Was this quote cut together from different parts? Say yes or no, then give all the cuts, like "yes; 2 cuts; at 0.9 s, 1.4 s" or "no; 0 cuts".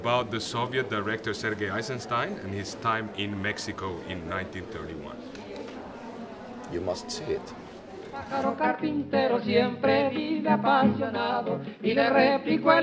no; 0 cuts